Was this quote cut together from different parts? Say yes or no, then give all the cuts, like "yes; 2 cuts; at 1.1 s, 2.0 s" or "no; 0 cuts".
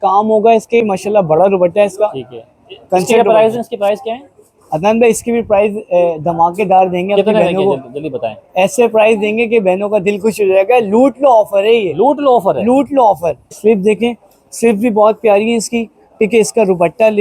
yes; 2 cuts; at 0.9 s, 13.6 s